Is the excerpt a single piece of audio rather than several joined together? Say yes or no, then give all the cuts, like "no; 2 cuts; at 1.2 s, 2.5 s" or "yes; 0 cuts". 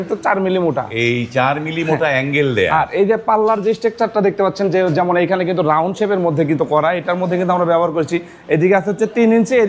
yes; 0 cuts